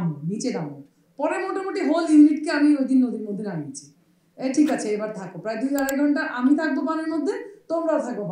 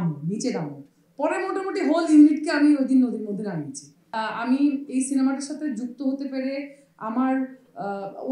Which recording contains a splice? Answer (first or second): second